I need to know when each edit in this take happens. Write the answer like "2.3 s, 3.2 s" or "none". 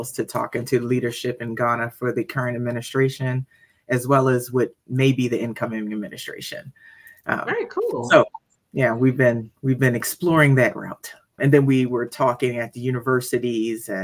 11.4 s